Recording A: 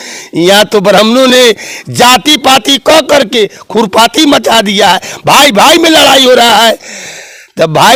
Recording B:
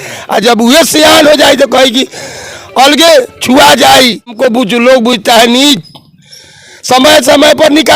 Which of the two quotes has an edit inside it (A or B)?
B